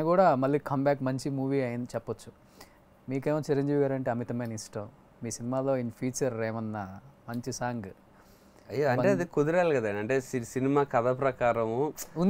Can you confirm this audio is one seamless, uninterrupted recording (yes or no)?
yes